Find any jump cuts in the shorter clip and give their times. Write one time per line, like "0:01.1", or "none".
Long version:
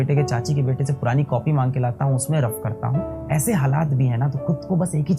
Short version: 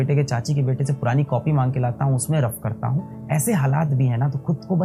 none

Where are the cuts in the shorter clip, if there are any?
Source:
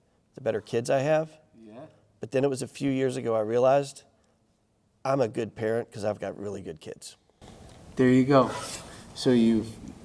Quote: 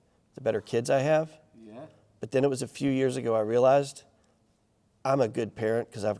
none

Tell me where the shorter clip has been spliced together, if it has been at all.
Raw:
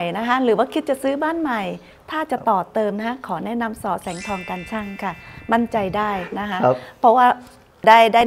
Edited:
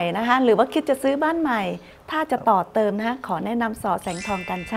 none

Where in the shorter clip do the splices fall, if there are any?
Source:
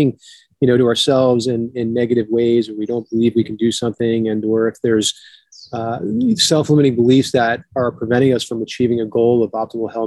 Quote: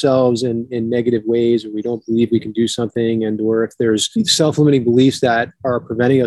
0:04.2

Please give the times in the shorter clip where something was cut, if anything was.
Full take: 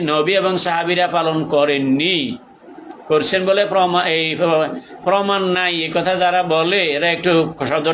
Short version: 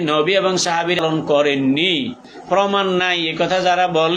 0:01.0
0:02.3

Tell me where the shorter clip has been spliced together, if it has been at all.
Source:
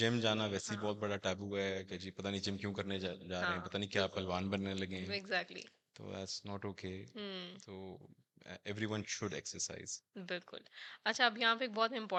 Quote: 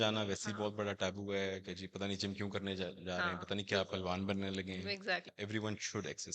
0:05.3

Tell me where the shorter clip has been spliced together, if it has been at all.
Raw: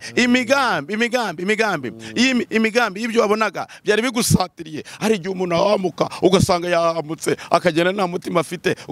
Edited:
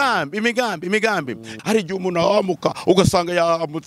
0:01.4

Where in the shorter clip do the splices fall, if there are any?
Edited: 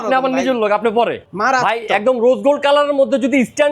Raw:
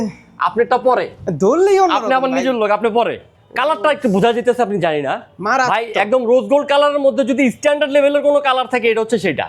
0:01.3

